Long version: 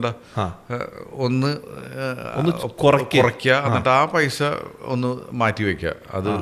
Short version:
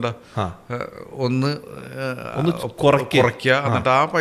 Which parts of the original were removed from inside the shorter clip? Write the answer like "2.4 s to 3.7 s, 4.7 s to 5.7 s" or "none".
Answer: none